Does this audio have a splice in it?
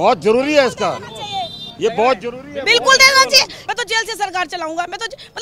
yes; 1 cut; at 3.6 s

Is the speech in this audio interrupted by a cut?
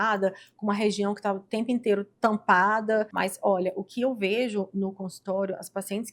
yes; 1 cut; at 3.1 s

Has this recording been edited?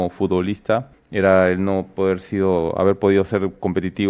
yes; 1 cut; at 1.0 s

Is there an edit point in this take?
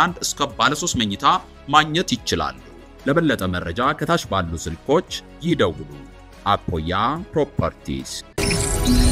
yes; 1 cut; at 8.1 s

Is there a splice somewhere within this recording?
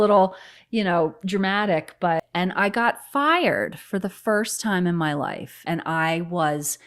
yes; 2 cuts; at 2.2 s, 5.6 s

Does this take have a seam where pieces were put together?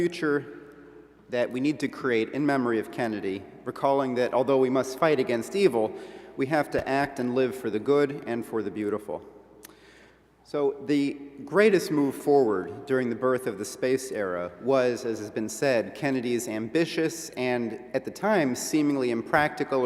yes; 1 cut; at 15.3 s

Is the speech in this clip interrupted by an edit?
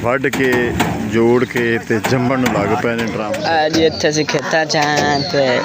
yes; 1 cut; at 3.2 s

